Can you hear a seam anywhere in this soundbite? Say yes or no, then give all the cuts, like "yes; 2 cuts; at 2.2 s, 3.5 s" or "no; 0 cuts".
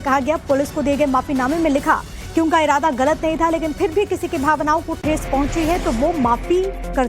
yes; 1 cut; at 5.8 s